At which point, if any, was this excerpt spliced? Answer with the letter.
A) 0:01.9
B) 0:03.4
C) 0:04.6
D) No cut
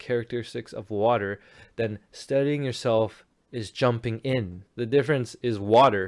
C